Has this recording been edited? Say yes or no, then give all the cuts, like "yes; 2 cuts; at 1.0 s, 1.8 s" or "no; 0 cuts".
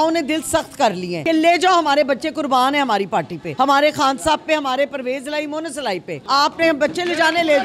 yes; 3 cuts; at 1.1 s, 3.4 s, 6.1 s